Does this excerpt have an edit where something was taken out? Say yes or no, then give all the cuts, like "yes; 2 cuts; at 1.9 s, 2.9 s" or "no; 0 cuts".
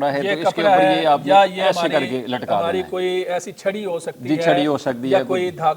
no; 0 cuts